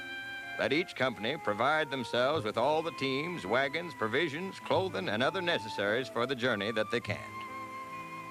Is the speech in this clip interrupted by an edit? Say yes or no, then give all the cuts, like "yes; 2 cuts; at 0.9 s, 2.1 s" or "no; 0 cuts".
no; 0 cuts